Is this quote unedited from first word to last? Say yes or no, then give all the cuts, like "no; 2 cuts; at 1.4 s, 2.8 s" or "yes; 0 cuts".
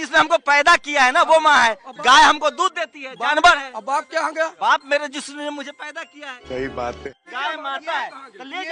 no; 3 cuts; at 4.5 s, 6.3 s, 7.3 s